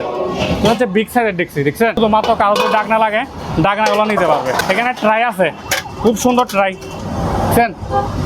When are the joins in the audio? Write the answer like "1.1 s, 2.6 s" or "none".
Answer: 2.0 s, 4.6 s